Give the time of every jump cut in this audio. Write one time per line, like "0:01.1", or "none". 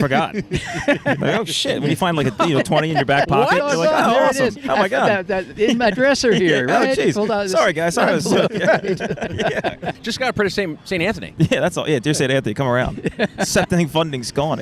0:10.0